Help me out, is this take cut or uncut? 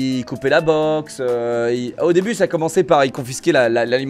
uncut